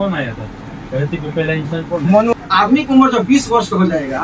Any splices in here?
yes; 1 cut; at 2.3 s

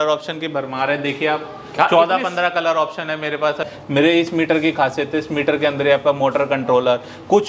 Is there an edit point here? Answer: yes; 1 cut; at 3.7 s

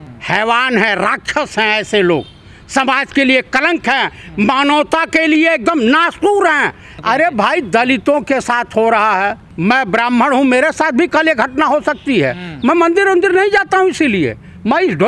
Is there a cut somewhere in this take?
yes; 2 cuts; at 6.9 s, 9.4 s

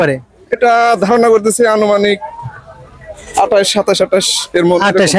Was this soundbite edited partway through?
no; 0 cuts

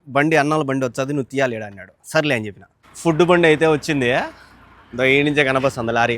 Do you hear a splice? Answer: yes; 1 cut; at 2.8 s

